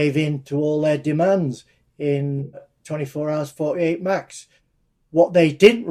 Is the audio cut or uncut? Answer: cut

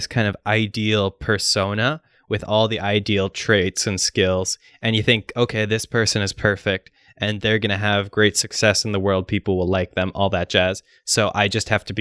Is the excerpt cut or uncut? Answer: uncut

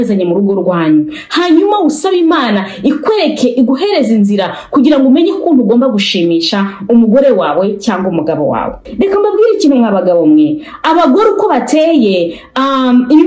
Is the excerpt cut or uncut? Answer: cut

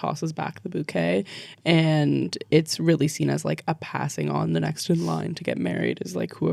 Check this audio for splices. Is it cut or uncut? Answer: uncut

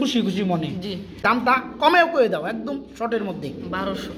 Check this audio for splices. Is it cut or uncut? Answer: cut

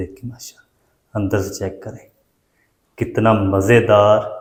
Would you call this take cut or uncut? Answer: uncut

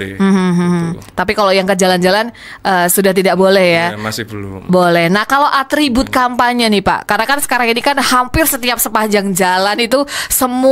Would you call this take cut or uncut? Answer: uncut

